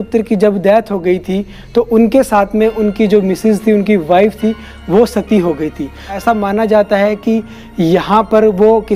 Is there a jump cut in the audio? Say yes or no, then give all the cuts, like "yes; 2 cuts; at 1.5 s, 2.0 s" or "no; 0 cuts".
yes; 1 cut; at 6.1 s